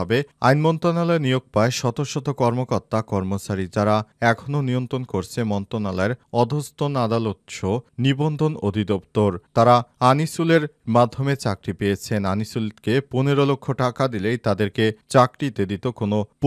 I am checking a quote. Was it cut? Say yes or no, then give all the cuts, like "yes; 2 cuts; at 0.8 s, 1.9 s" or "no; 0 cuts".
no; 0 cuts